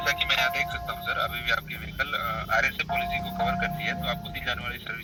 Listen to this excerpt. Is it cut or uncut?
uncut